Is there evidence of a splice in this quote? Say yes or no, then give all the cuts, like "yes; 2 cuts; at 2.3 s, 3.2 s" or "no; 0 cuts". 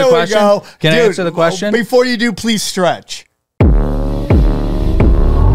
yes; 1 cut; at 3.4 s